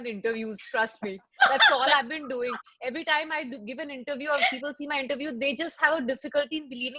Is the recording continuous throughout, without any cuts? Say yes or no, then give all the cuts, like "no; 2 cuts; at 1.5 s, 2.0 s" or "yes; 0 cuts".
yes; 0 cuts